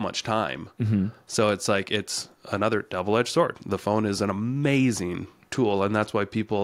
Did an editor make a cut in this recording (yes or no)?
no